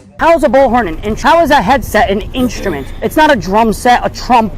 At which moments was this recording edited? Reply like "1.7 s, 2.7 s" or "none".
1.1 s